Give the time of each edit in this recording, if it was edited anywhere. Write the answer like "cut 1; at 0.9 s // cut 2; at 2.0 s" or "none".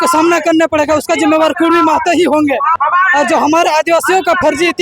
cut 1; at 2.8 s